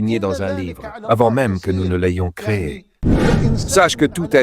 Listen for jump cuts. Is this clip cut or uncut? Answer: cut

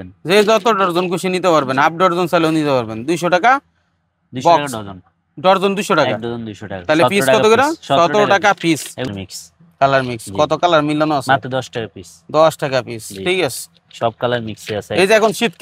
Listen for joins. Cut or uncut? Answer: cut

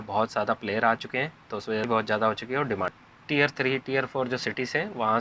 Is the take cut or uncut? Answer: cut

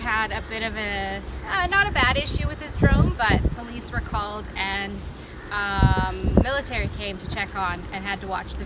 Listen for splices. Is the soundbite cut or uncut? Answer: uncut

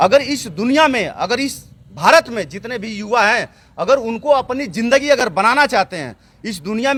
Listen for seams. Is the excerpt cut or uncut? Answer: uncut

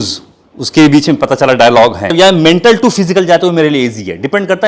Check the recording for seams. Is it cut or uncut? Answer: cut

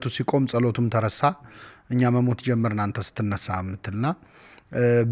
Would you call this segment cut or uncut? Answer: uncut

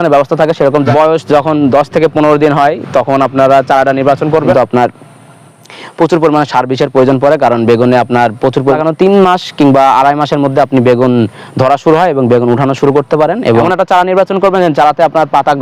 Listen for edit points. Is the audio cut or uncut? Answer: cut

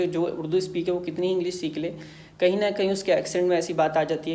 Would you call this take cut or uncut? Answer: uncut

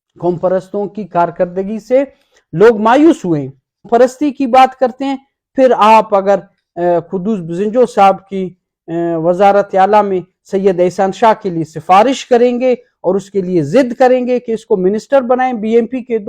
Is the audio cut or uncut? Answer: cut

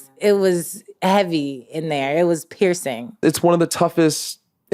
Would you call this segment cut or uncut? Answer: cut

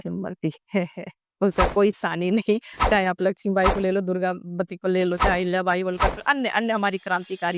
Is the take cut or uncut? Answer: uncut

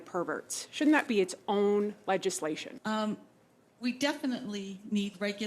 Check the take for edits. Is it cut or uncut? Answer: cut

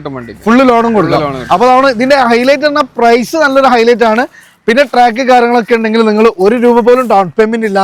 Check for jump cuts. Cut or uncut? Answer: uncut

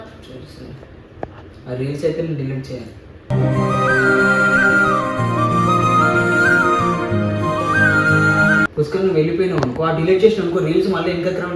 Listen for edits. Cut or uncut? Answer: cut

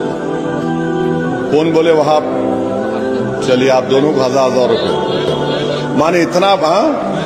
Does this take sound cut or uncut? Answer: uncut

